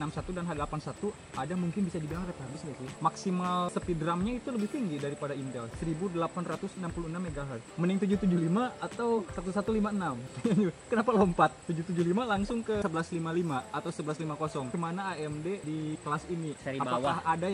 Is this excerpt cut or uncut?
cut